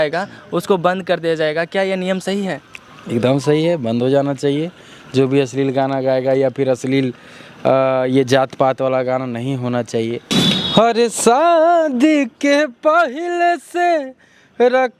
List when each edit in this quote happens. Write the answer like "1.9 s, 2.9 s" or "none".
10.5 s